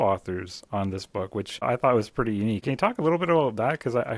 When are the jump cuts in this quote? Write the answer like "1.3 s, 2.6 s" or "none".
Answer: 1.6 s, 2.6 s